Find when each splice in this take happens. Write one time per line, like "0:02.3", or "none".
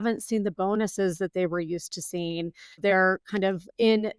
0:02.8